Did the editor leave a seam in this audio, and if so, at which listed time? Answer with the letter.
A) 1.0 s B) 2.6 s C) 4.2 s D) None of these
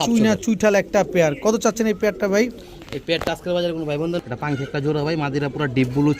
C